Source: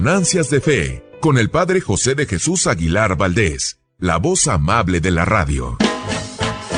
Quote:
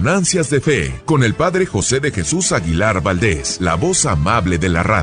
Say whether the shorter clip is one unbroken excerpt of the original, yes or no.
no